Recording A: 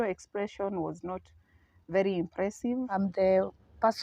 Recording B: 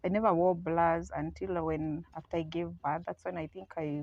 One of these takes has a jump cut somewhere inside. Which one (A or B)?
A